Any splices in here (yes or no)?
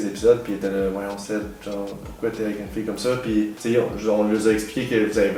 no